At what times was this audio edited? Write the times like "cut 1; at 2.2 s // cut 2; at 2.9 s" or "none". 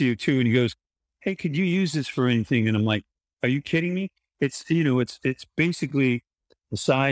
none